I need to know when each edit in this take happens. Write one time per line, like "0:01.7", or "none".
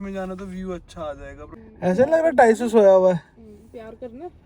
0:01.4